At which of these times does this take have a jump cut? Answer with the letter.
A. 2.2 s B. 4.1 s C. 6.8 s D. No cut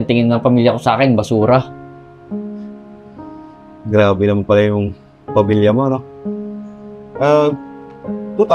D